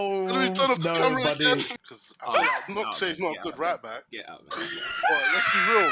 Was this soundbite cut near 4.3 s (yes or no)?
no